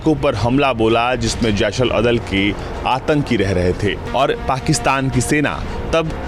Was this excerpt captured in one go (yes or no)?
no